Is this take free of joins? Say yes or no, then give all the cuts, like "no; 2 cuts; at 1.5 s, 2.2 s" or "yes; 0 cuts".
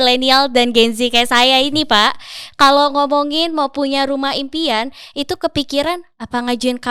yes; 0 cuts